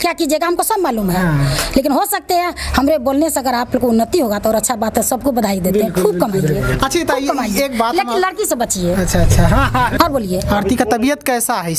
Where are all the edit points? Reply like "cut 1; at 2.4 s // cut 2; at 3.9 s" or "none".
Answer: cut 1; at 9.9 s